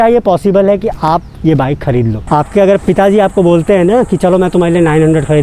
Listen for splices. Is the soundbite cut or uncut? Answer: cut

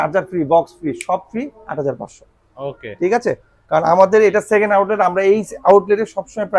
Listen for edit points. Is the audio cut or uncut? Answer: uncut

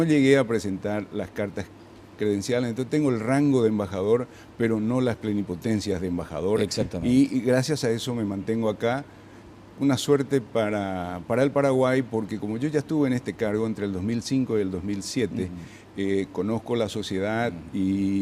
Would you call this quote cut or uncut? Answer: cut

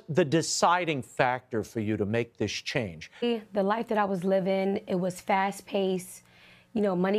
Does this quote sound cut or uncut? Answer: cut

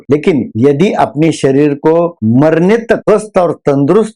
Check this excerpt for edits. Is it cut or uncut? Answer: cut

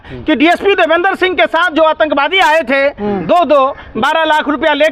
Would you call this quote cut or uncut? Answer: uncut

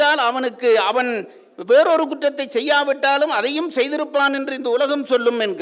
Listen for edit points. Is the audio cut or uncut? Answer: uncut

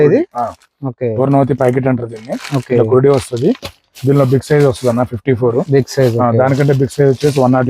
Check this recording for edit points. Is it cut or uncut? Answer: uncut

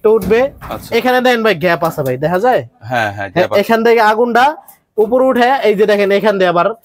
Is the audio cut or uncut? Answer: uncut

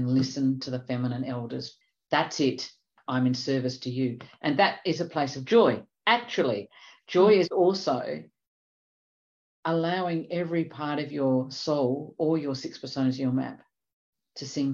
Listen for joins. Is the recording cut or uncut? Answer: cut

